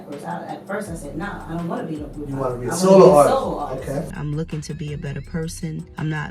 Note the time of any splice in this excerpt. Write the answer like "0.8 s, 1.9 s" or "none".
4.1 s